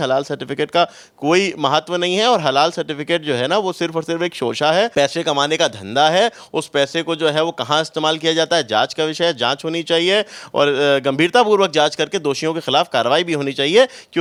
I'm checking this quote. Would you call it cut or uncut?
uncut